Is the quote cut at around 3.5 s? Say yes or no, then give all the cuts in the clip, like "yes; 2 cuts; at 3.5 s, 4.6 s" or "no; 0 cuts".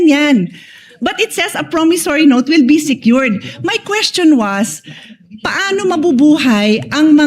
no; 0 cuts